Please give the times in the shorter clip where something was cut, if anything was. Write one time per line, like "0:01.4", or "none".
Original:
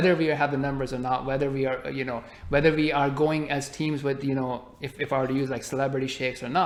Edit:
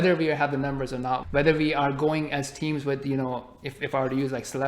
0:01.2